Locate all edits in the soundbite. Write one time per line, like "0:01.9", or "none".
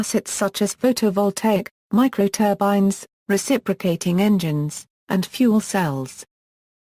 0:05.2

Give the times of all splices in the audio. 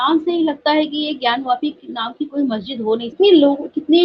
0:03.1

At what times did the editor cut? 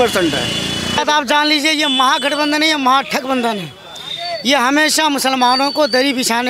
0:01.0

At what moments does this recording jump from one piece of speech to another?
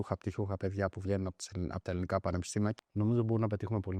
0:02.8

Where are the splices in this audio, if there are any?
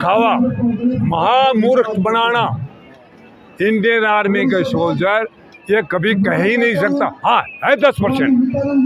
none

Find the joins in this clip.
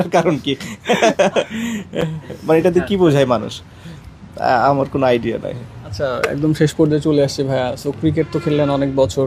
none

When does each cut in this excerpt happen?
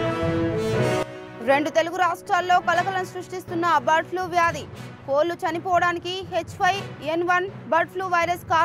0:01.0

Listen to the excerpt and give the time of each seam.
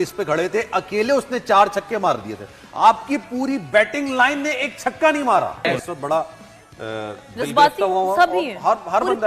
0:05.6

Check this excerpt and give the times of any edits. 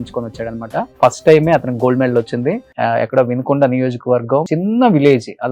0:00.9
0:02.7
0:04.5

